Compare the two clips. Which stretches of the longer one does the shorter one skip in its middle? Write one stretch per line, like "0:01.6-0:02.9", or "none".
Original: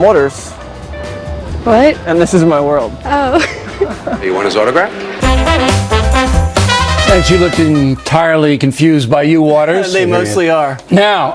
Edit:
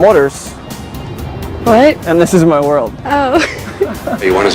none